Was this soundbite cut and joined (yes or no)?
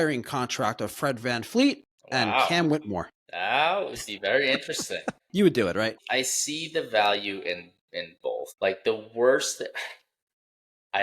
yes